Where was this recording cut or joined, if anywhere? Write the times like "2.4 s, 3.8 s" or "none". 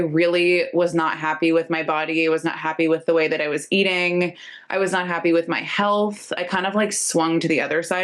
none